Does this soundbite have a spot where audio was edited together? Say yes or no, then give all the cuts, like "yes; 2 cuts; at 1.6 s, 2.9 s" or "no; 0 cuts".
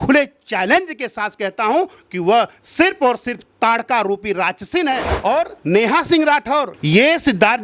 yes; 1 cut; at 5.1 s